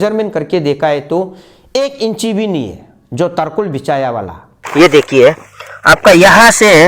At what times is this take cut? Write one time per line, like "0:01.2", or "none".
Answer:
0:04.6